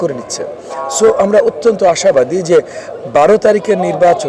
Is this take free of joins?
yes; 0 cuts

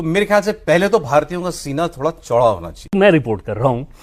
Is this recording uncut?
no; 1 cut; at 2.9 s

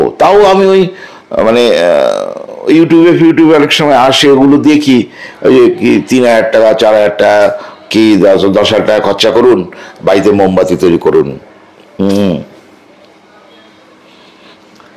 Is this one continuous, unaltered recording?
yes; 0 cuts

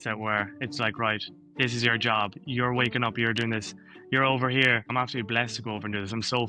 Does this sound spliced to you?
yes; 1 cut; at 4.9 s

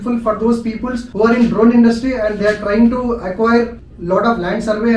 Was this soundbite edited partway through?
no; 0 cuts

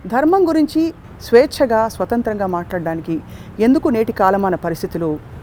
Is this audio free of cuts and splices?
yes; 0 cuts

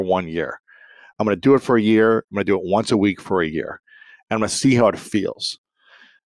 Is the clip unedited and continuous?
yes; 0 cuts

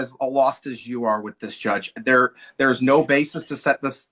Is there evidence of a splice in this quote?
no; 0 cuts

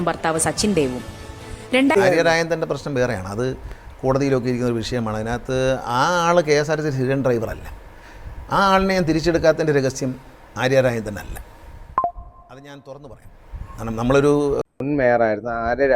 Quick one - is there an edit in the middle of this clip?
yes; 2 cuts; at 1.9 s, 14.7 s

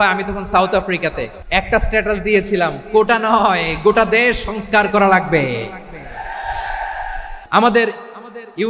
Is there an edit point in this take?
yes; 2 cuts; at 1.3 s, 7.3 s

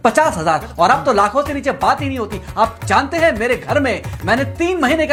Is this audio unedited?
yes; 0 cuts

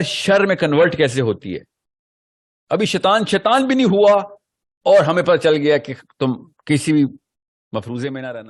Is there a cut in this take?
no; 0 cuts

